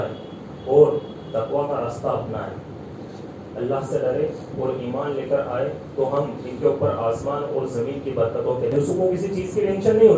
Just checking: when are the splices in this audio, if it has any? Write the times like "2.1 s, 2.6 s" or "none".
8.7 s